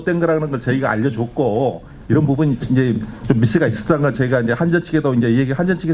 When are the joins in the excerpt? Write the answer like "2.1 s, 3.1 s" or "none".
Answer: none